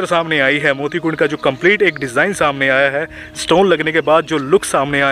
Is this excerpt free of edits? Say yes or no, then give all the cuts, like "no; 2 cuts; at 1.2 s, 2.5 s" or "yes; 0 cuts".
yes; 0 cuts